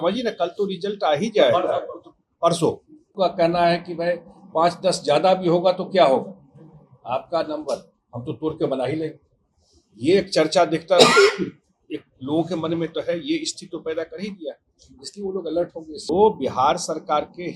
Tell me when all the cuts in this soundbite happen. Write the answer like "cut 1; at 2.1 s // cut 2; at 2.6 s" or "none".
cut 1; at 3.1 s // cut 2; at 16.1 s